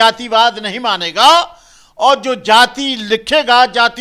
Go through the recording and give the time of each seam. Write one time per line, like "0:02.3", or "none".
none